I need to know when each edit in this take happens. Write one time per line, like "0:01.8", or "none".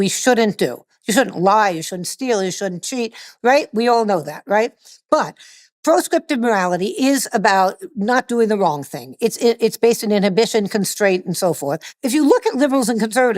0:04.8
0:11.9